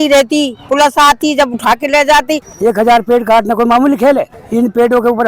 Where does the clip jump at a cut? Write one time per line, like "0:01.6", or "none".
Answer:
0:02.5
0:04.4